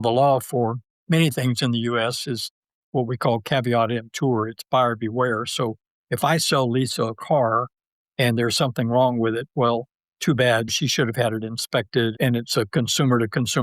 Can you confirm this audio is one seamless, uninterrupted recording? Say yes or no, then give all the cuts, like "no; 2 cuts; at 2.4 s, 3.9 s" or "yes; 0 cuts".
no; 3 cuts; at 0.9 s, 10.7 s, 12.1 s